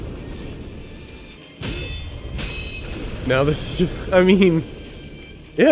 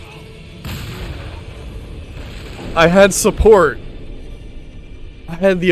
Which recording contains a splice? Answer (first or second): first